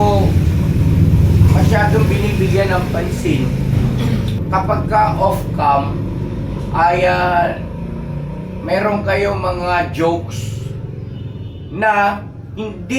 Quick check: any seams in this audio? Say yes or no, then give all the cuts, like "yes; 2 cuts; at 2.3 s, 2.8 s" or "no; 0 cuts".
yes; 1 cut; at 4.4 s